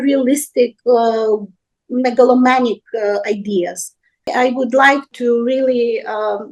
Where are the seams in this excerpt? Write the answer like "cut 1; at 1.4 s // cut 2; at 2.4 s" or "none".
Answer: cut 1; at 4.2 s